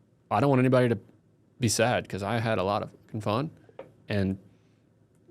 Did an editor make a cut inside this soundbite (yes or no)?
no